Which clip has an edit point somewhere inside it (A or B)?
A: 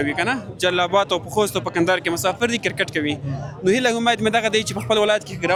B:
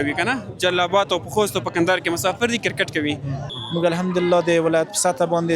B